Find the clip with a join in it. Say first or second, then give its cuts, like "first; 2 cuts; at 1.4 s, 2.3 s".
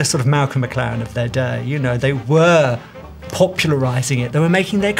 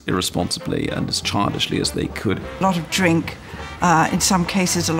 second; 1 cut; at 2.6 s